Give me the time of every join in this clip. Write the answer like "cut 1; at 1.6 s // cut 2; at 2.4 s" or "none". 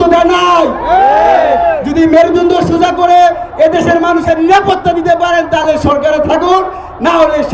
none